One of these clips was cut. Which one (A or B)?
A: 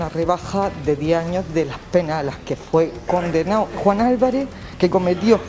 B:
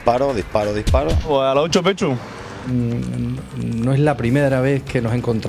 A